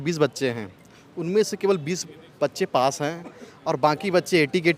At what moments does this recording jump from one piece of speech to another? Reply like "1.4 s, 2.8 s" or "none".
none